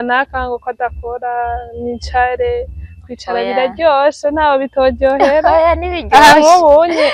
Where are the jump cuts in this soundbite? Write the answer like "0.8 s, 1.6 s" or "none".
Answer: none